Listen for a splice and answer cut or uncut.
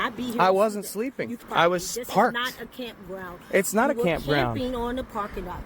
cut